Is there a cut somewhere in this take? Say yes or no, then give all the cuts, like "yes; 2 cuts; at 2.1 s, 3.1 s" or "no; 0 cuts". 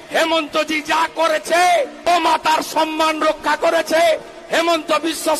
yes; 1 cut; at 2.0 s